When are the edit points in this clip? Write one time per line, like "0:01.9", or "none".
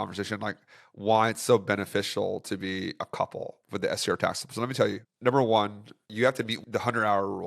0:05.0
0:06.5